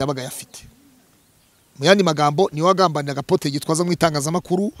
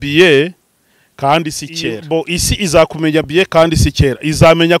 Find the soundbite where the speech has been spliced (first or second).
second